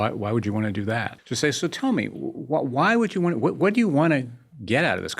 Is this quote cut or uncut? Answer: cut